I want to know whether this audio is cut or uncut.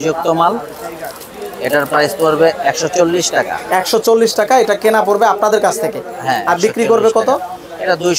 uncut